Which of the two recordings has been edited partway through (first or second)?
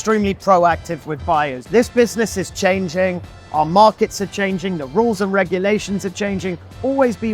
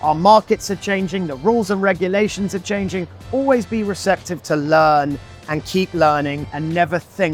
first